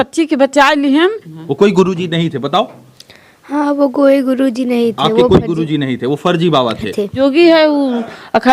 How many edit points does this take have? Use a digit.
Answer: 2